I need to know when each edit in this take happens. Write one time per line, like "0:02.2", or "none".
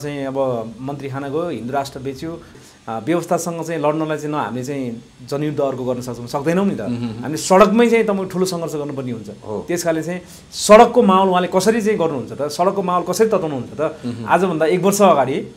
0:02.6